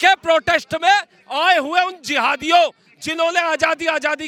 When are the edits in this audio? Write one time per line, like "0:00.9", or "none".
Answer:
none